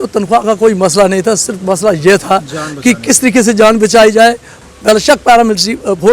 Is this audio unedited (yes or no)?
no